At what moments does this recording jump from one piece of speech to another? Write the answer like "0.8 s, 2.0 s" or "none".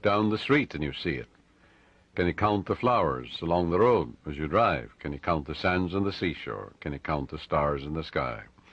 none

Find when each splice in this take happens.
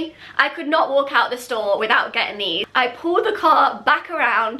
2.6 s

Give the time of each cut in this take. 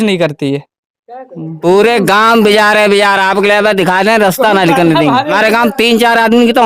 1.0 s, 5.3 s

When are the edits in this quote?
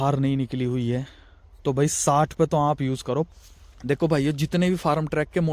3.3 s

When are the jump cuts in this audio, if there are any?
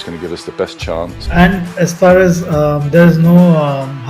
1.2 s

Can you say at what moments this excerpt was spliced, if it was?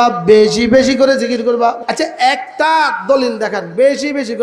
1.8 s

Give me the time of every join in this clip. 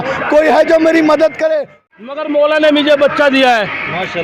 1.8 s

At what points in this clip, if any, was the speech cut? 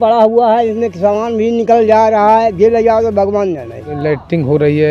3.9 s

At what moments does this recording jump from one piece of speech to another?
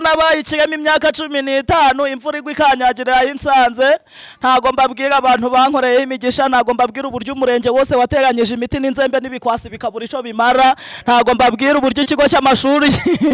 none

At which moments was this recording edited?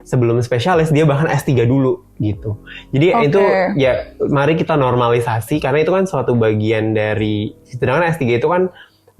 none

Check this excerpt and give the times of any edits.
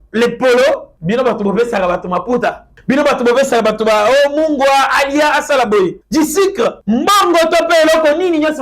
0.9 s, 2.7 s, 6.0 s, 6.8 s

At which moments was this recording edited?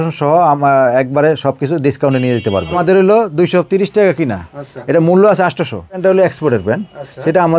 2.7 s, 6.0 s

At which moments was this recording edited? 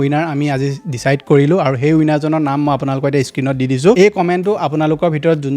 none

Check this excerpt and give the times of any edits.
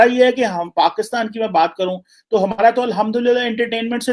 none

